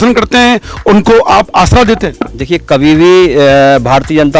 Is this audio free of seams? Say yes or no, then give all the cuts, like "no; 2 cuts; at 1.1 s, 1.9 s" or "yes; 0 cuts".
yes; 0 cuts